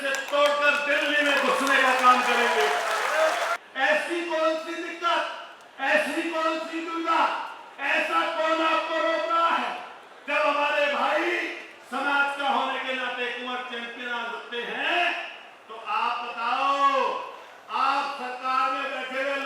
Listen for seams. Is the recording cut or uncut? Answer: cut